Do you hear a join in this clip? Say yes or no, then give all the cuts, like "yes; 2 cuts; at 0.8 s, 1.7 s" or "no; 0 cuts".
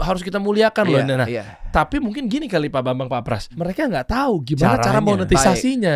yes; 1 cut; at 3.5 s